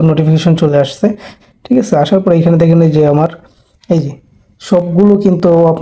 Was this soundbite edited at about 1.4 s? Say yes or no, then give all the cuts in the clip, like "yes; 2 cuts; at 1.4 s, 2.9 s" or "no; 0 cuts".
yes; 1 cut; at 1.4 s